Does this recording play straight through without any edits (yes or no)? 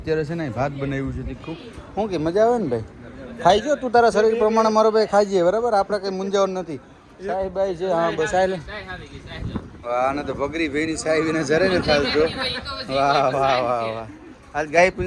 yes